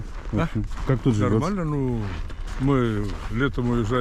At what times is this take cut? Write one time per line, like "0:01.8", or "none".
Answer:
none